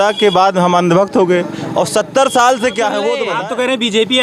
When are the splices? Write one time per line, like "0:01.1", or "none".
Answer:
0:03.3